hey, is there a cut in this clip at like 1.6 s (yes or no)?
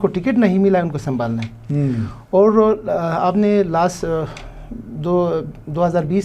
no